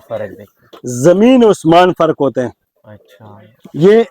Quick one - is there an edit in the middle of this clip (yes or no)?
no